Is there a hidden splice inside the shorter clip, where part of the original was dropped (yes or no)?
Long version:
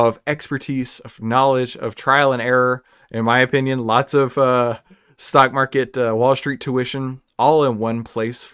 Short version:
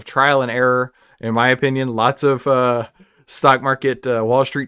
no